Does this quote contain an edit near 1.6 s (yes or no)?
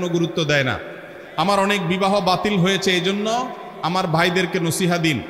no